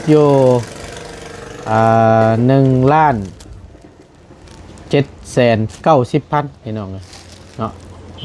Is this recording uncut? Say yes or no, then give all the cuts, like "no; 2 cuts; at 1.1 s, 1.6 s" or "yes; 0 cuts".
yes; 0 cuts